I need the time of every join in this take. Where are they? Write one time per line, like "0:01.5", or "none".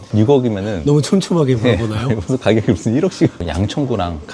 0:03.4